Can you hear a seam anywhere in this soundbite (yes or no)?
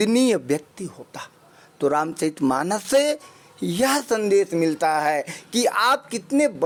no